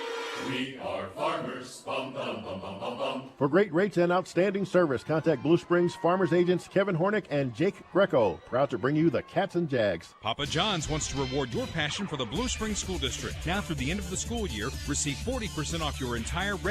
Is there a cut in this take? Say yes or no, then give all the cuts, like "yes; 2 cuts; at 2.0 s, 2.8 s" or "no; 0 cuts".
yes; 1 cut; at 10.1 s